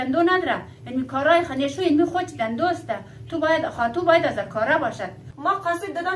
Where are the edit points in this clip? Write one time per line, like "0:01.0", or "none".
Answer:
0:05.2